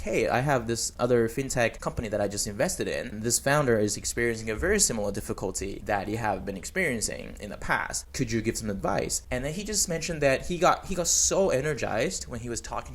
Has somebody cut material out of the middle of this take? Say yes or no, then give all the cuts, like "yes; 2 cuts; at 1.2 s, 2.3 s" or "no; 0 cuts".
yes; 4 cuts; at 3.1 s, 5.8 s, 8.0 s, 9.2 s